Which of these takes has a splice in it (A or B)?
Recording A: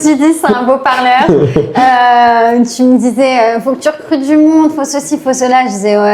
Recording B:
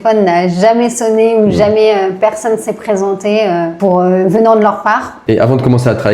B